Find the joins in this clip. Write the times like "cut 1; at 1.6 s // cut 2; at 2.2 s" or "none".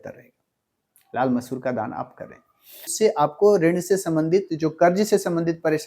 cut 1; at 2.9 s